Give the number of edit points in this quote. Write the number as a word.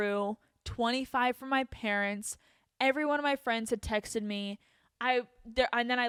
zero